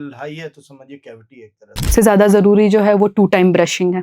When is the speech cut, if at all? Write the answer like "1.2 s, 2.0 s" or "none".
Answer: 1.9 s